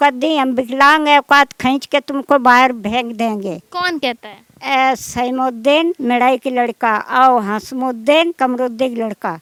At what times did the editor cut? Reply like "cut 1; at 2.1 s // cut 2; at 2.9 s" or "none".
none